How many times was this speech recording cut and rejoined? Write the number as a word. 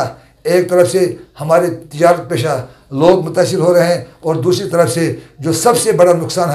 zero